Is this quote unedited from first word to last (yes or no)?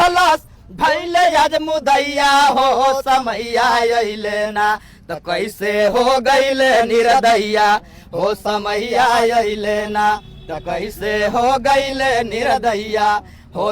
yes